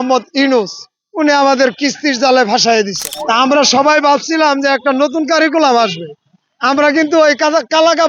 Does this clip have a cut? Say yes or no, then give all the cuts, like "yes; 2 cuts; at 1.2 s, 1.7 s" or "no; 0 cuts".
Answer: yes; 1 cut; at 3.1 s